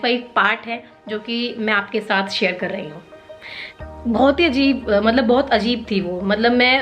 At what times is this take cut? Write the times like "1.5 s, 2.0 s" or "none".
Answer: 3.6 s